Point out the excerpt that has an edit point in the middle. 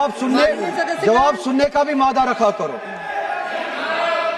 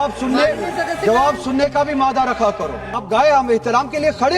second; 1 cut; at 3.0 s

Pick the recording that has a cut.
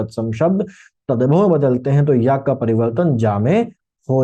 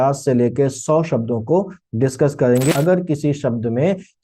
second; 1 cut; at 2.7 s

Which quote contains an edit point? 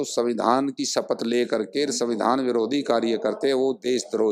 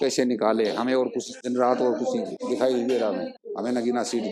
second; 3 cuts; at 1.4 s, 2.4 s, 3.4 s

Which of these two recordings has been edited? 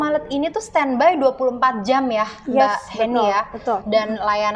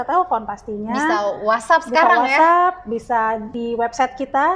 second; 1 cut; at 3.6 s

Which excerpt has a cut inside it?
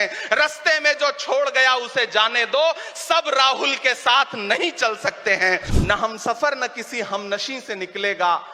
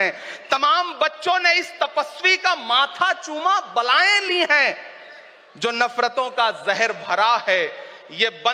first; 1 cut; at 5.7 s

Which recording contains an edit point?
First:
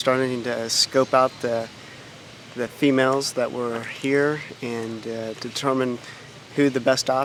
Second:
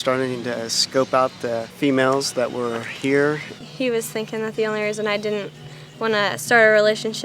second; 2 cuts; at 1.7 s, 3.6 s

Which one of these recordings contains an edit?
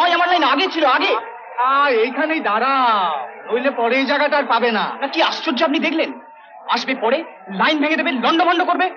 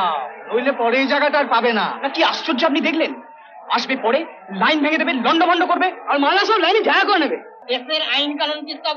second; 1 cut; at 7.5 s

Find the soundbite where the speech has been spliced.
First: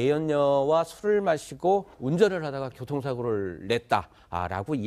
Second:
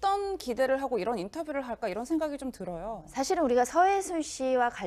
first; 1 cut; at 1.4 s

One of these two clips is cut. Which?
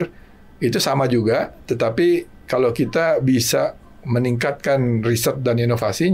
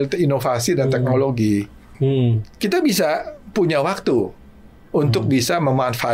second; 1 cut; at 1.9 s

